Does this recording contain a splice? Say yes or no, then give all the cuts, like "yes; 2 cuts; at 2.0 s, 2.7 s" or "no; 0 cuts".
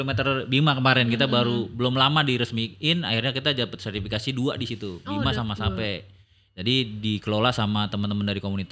no; 0 cuts